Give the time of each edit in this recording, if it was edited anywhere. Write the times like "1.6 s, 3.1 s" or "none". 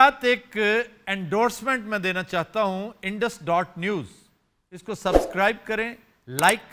none